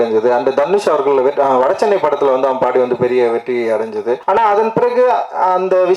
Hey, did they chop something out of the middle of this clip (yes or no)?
yes